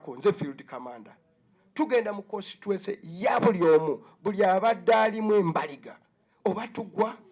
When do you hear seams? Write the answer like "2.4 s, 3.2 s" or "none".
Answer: none